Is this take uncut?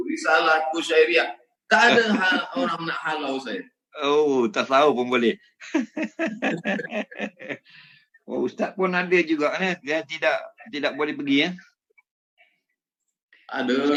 yes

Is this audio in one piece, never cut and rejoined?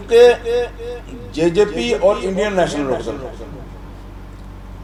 yes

